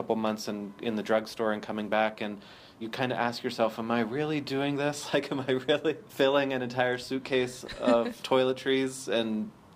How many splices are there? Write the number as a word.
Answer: three